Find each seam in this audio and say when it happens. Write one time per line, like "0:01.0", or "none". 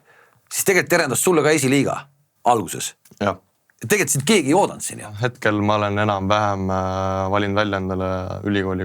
0:05.2

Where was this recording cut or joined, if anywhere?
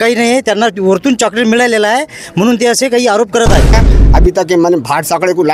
0:03.8

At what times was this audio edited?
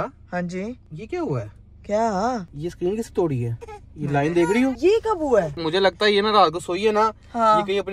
0:00.9
0:02.5
0:04.8
0:05.6

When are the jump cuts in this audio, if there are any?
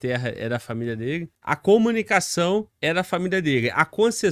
0:01.6
0:02.8

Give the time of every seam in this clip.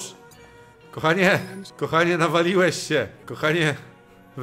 0:01.6
0:03.2

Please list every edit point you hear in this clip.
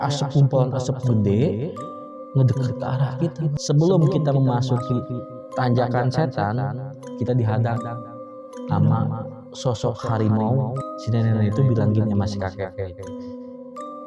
0:03.5
0:10.9

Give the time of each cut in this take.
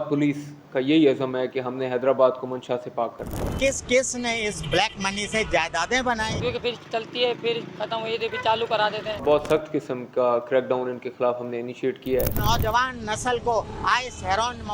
0:03.5
0:06.3
0:09.2
0:12.3

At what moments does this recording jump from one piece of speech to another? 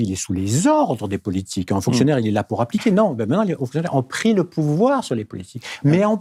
none

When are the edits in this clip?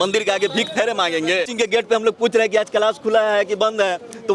0:01.5

